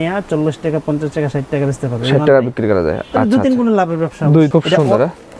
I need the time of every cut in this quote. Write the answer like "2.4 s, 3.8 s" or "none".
4.5 s